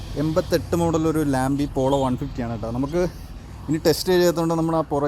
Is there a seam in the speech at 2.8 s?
no; 0 cuts

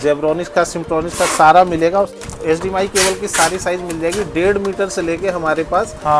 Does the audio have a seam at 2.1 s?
yes; 1 cut; at 2.1 s

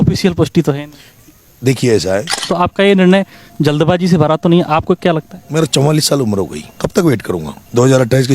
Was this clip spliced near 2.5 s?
yes; 1 cut; at 2.5 s

